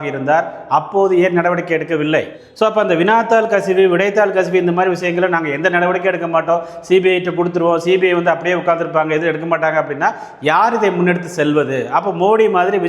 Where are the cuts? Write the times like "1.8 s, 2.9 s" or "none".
2.4 s